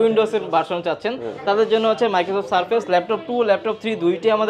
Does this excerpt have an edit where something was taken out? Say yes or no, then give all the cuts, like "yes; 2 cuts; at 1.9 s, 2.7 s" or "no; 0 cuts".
no; 0 cuts